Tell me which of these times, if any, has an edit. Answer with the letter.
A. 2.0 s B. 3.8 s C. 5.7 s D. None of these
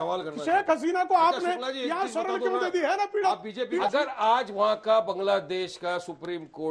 B